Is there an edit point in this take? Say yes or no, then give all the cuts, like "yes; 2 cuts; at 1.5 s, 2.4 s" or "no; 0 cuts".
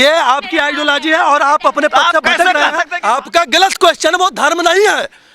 yes; 1 cut; at 2.9 s